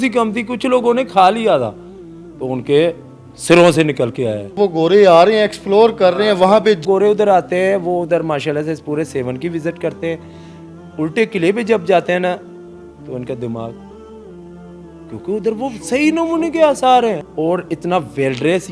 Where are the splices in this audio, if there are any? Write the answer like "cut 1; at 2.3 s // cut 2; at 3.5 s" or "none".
cut 1; at 4.5 s // cut 2; at 6.8 s // cut 3; at 17.2 s